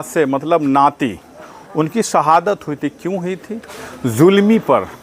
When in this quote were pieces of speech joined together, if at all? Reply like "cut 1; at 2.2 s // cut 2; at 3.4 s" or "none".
none